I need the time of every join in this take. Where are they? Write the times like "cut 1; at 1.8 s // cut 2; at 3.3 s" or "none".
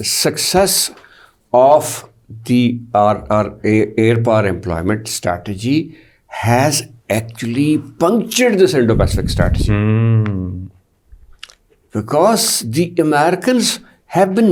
none